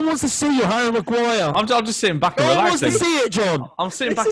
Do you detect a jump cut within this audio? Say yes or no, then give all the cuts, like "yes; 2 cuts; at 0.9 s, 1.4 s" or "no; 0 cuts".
no; 0 cuts